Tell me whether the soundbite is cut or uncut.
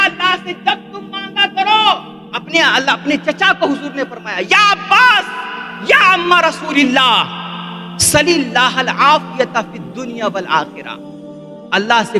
uncut